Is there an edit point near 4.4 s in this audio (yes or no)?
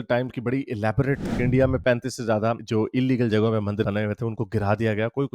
no